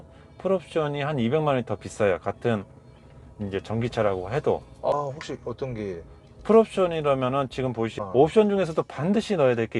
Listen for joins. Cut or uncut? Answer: cut